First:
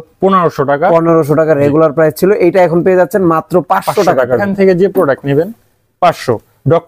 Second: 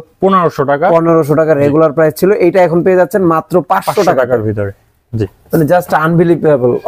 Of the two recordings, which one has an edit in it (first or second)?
first